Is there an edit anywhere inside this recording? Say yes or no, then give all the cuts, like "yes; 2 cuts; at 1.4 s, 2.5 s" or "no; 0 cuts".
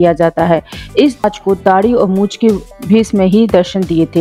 yes; 1 cut; at 1.2 s